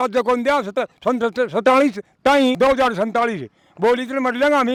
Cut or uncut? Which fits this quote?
uncut